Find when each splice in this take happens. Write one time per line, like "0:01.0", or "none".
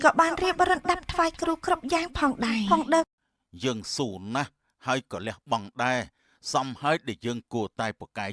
none